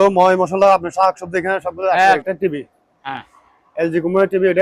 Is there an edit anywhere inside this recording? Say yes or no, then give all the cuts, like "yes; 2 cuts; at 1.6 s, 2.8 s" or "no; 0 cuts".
yes; 1 cut; at 2.2 s